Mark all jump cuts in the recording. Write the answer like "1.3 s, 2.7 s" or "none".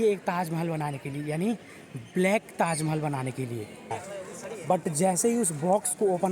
4.0 s